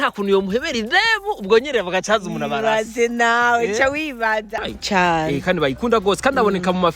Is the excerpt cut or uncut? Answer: cut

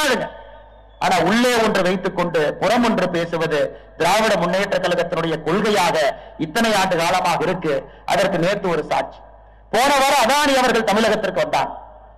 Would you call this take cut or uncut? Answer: uncut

